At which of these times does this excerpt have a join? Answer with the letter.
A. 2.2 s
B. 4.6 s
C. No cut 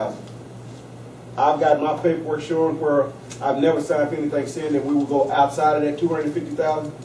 B